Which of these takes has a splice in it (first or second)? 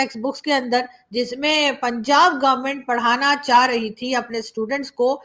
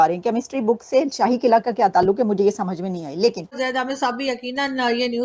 second